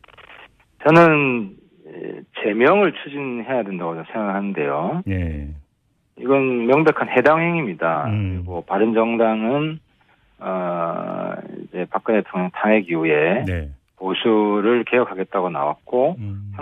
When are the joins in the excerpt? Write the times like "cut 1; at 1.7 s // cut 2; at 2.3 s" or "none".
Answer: none